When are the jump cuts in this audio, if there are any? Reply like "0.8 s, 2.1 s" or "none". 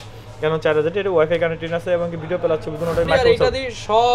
3.1 s